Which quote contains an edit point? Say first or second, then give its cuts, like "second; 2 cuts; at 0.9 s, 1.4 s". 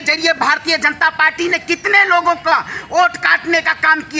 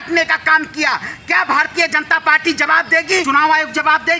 second; 1 cut; at 3.2 s